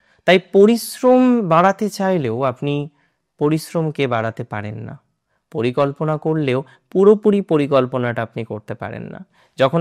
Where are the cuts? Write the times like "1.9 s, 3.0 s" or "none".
none